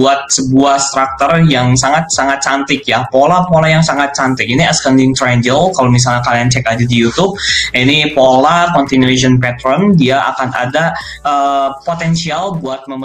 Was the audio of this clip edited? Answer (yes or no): no